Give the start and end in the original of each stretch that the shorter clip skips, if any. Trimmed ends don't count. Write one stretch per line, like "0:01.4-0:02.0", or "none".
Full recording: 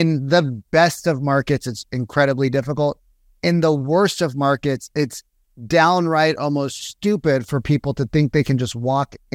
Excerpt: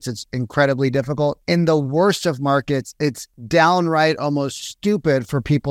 0:03.0-0:03.4
0:05.3-0:05.5

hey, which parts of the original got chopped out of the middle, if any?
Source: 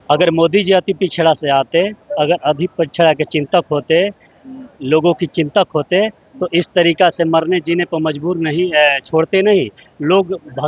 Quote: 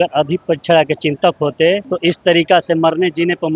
0:04.2-0:06.4

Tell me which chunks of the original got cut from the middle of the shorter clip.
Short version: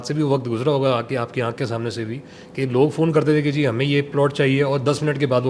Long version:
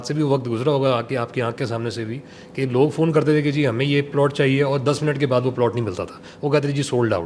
none

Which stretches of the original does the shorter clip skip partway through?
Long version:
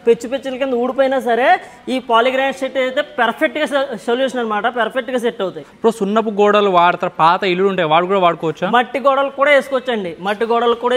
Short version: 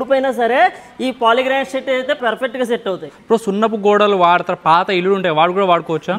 0:03.1-0:04.7

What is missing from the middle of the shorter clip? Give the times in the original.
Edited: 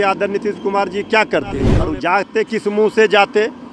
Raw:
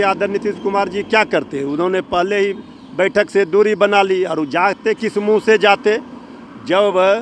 0:01.8-0:04.3

